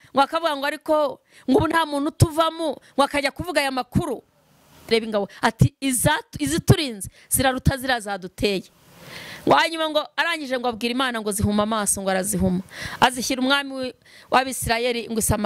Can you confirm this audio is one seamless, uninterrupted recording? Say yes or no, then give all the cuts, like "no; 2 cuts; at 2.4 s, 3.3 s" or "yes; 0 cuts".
no; 1 cut; at 4.9 s